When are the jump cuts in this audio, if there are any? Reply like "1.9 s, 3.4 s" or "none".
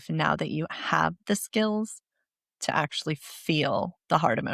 none